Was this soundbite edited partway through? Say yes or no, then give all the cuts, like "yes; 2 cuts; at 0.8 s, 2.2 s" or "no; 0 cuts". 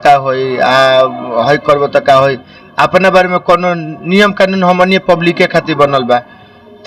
no; 0 cuts